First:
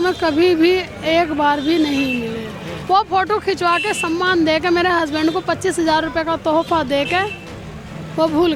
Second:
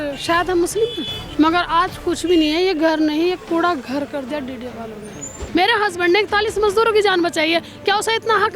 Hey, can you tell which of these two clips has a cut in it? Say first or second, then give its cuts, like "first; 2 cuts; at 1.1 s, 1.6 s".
second; 2 cuts; at 1.1 s, 5.4 s